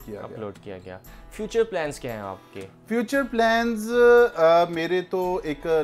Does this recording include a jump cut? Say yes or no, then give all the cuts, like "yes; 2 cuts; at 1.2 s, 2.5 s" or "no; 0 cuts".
no; 0 cuts